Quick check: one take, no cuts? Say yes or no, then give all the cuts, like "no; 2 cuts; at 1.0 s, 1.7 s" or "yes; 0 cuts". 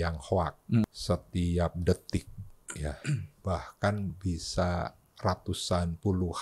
no; 2 cuts; at 0.8 s, 3.4 s